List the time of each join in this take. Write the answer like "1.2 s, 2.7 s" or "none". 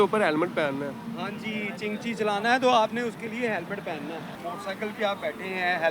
4.3 s